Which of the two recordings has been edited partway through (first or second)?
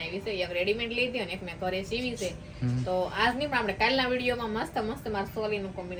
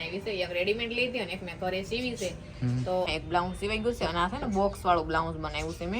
second